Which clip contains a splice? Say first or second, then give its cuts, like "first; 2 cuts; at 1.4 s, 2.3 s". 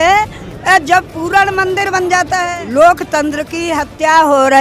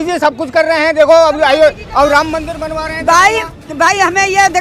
first; 1 cut; at 2.5 s